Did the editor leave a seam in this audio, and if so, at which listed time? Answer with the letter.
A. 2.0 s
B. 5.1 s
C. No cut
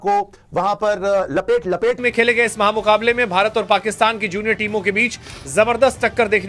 A